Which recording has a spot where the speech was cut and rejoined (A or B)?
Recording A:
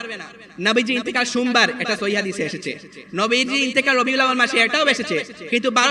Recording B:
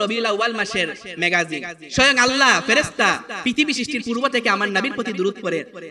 B